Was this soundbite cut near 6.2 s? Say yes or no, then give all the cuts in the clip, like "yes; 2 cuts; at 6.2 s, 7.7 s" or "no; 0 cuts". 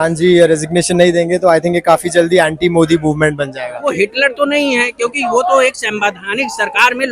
no; 1 cut; at 3.8 s